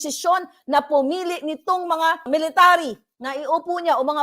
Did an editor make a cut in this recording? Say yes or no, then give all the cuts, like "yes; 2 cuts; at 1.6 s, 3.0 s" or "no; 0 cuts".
yes; 1 cut; at 2.2 s